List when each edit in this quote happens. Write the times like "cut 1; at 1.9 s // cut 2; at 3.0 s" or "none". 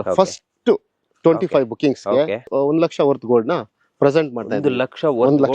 none